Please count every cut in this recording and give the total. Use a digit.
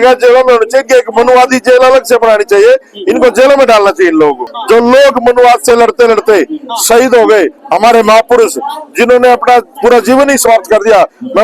1